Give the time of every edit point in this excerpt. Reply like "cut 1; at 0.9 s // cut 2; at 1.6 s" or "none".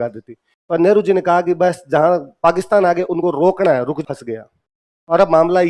cut 1; at 4.0 s